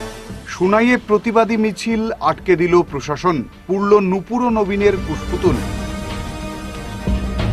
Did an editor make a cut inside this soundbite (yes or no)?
no